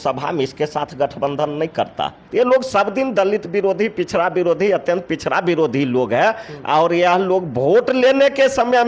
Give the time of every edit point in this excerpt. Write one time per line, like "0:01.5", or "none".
0:02.2